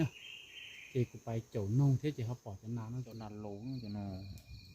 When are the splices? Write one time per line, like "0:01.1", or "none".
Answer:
0:03.1